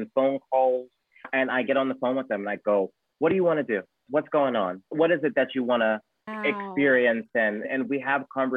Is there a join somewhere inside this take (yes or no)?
yes